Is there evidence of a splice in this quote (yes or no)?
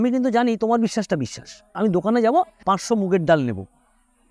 yes